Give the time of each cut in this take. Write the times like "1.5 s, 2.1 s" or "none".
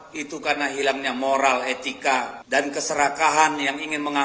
2.4 s